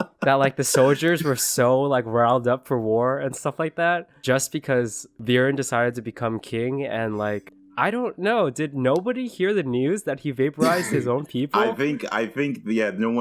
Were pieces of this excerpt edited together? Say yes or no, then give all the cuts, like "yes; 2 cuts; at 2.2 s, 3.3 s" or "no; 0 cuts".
yes; 3 cuts; at 4.1 s, 5.1 s, 7.6 s